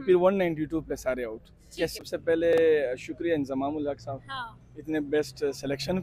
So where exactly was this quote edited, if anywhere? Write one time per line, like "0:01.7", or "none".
0:02.0